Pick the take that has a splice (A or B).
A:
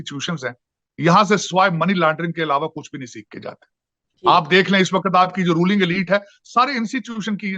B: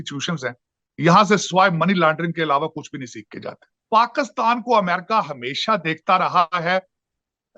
B